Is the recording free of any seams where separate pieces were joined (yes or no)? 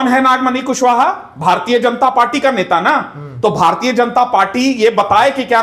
yes